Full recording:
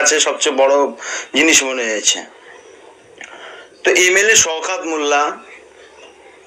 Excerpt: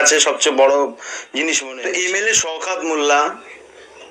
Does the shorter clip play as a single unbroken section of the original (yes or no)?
no